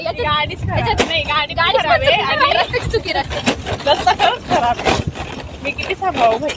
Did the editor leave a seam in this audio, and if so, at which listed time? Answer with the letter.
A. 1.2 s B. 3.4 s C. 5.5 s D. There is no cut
D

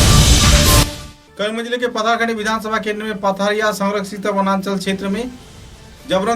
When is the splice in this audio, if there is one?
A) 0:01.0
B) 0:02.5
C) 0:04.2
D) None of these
A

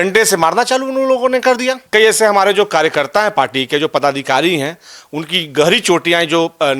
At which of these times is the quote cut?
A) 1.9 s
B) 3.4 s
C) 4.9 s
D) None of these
A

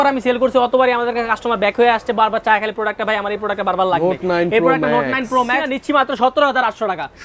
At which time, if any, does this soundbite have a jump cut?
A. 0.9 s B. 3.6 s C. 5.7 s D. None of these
C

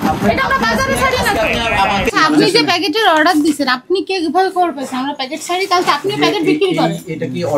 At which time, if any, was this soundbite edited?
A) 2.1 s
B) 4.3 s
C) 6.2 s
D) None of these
A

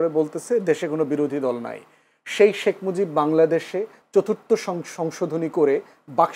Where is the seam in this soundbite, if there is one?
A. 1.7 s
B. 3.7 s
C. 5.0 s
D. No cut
D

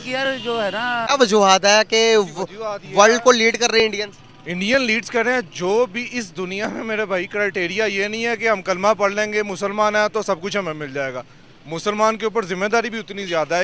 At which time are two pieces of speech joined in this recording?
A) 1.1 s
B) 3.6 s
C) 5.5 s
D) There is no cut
A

